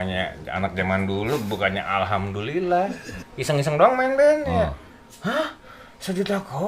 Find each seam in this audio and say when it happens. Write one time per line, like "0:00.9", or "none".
0:03.3